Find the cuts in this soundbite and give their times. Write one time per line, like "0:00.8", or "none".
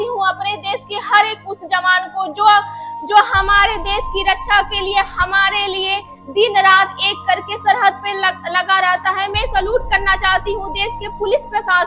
none